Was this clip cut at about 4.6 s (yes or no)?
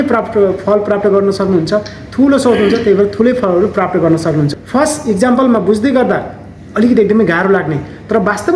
yes